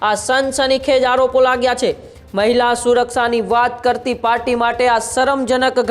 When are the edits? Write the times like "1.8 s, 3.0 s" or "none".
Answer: none